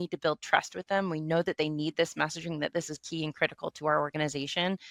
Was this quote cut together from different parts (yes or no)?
no